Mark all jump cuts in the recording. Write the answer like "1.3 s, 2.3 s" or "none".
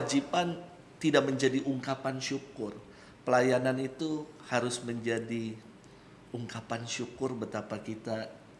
none

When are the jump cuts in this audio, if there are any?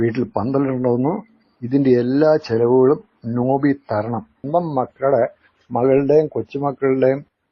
4.3 s

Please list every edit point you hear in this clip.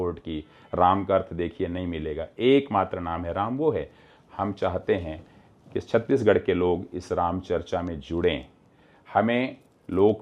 none

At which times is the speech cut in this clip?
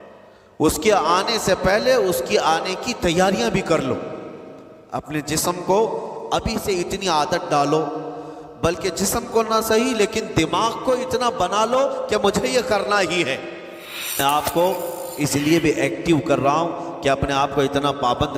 14.2 s

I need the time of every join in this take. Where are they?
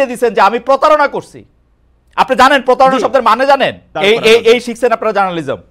3.9 s

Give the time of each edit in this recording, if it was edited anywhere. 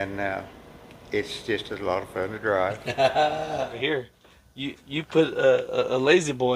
3.8 s

